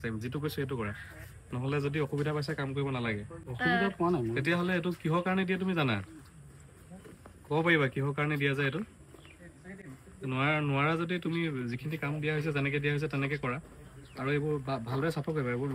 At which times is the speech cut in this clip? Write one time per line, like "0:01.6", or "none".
none